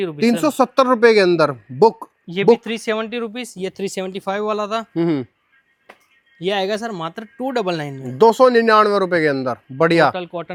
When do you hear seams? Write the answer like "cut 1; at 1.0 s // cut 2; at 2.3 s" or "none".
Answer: none